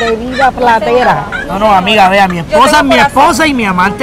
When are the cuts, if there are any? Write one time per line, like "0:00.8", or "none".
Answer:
none